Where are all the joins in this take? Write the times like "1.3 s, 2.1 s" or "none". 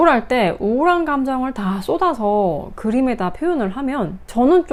none